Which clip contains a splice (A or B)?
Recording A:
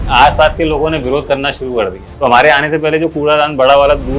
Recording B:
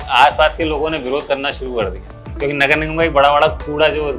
A